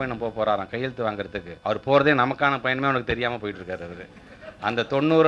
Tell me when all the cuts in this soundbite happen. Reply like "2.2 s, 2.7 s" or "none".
1.5 s

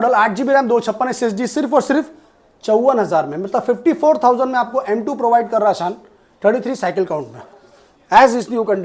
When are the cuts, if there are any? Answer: none

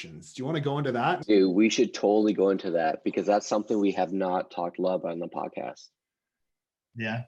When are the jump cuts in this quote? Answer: 1.2 s

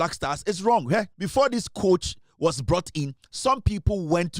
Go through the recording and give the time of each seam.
1.2 s

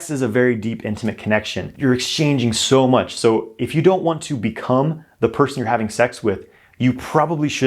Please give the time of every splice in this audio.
1.7 s

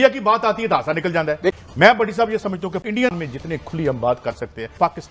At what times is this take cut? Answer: 1.6 s

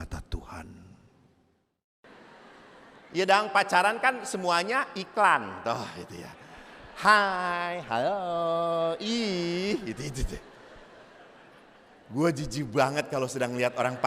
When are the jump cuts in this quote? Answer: 2.0 s

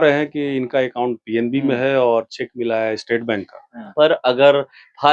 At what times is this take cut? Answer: 3.9 s

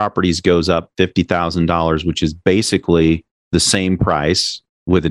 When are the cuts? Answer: 3.5 s

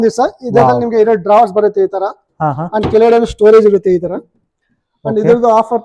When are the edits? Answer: none

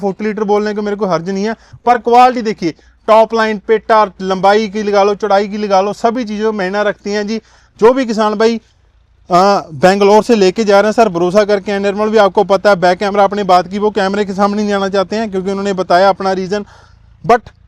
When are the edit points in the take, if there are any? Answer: none

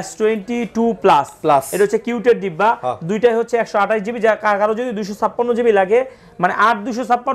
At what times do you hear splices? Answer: none

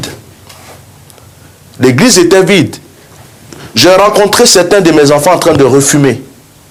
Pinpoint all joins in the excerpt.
none

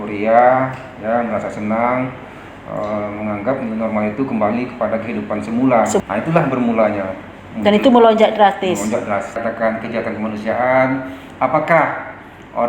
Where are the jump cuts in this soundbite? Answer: 6.0 s, 9.4 s

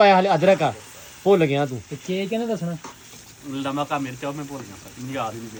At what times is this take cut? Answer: none

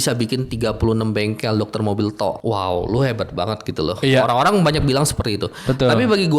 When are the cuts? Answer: 2.4 s

